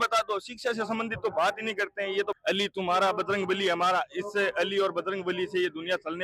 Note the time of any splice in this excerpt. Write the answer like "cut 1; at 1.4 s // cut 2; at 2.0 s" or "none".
cut 1; at 2.4 s